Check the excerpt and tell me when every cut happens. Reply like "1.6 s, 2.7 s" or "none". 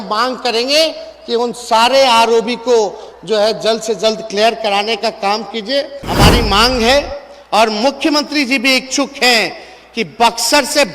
6.0 s